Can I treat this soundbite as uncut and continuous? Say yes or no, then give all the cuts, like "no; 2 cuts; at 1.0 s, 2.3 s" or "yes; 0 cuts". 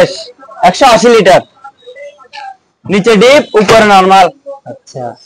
yes; 0 cuts